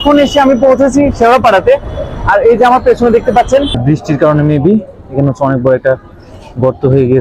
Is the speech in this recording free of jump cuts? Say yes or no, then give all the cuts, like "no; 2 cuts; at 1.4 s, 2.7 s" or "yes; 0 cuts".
no; 1 cut; at 3.7 s